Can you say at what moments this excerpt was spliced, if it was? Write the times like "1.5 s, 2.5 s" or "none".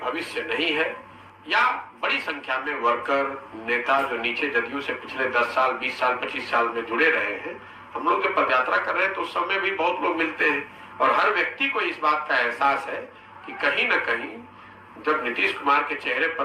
1.0 s